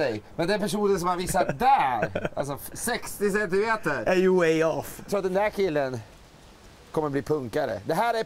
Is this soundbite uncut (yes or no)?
no